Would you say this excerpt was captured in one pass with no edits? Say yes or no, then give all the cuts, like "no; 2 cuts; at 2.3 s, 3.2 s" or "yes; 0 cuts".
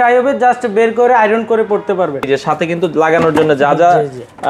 no; 1 cut; at 2.2 s